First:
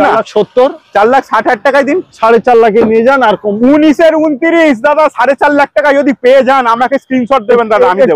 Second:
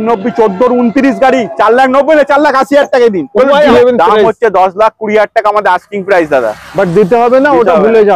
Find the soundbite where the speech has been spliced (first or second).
second